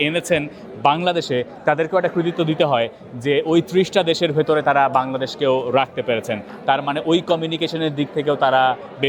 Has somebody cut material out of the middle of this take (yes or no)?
no